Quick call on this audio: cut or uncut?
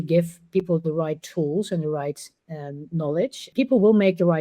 cut